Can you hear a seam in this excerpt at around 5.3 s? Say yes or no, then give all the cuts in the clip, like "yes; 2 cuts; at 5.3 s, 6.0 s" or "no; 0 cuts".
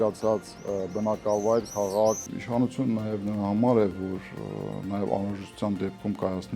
no; 1 cut; at 2.3 s